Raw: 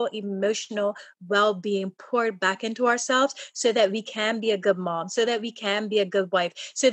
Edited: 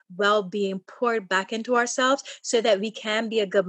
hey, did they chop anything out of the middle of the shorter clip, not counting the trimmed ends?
no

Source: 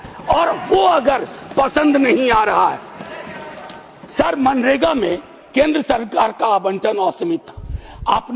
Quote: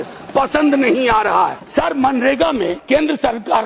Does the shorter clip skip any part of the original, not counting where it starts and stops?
yes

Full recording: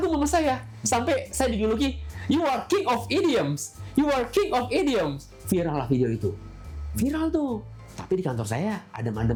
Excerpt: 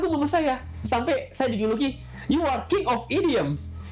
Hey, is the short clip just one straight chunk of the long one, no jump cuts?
yes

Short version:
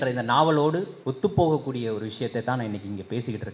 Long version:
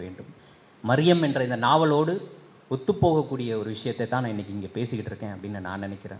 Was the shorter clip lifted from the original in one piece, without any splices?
no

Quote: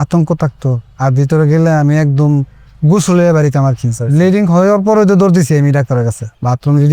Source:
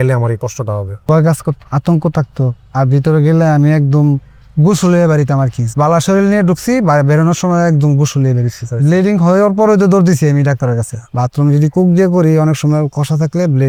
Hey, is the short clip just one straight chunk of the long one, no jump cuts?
no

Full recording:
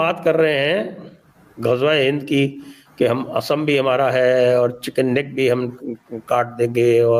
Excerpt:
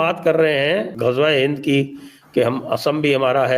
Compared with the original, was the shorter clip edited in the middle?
yes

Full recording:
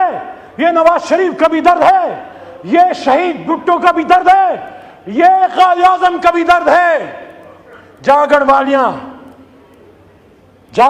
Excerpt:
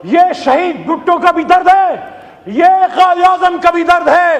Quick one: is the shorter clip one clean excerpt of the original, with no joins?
yes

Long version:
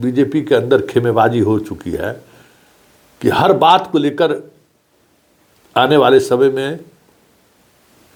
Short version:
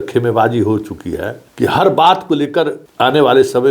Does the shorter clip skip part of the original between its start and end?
yes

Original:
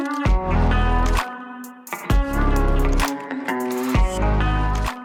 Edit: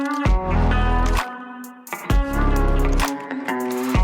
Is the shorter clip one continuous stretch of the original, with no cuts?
yes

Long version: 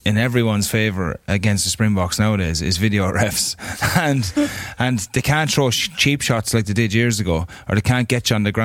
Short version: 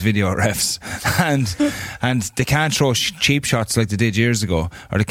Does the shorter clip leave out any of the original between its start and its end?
no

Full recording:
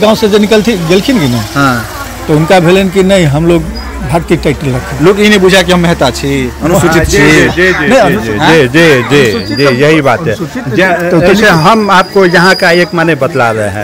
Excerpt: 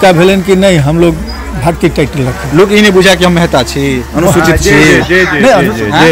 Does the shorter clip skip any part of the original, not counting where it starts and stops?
no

